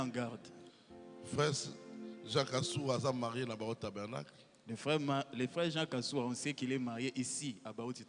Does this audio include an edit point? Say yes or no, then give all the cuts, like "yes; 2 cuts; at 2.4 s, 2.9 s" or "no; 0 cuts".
no; 0 cuts